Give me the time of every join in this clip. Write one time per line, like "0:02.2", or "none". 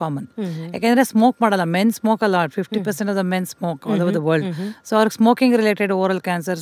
none